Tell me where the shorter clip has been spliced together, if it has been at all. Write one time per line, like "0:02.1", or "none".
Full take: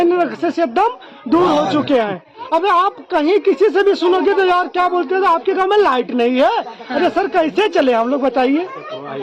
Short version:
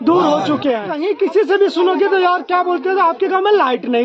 0:01.1